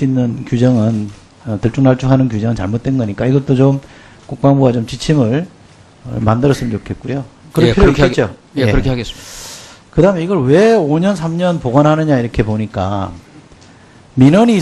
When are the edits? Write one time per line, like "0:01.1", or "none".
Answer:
0:12.2